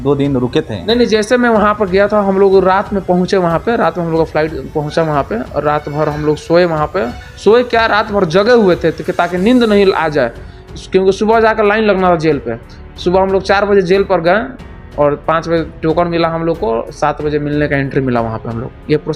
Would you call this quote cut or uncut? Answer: uncut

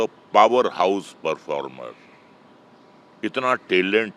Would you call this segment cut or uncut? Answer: uncut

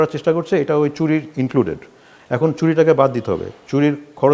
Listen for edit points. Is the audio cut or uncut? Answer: uncut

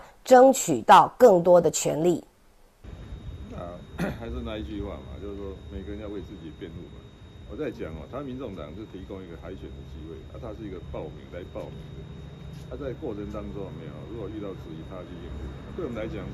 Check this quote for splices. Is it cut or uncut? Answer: cut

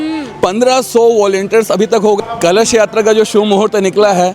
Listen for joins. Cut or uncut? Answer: cut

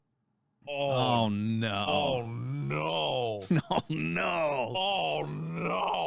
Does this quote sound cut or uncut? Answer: uncut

